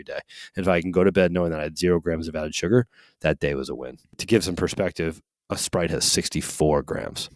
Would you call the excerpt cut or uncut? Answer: cut